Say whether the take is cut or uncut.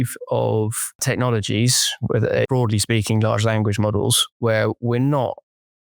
cut